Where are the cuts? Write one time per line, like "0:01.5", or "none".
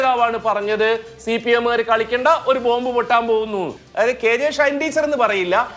0:03.8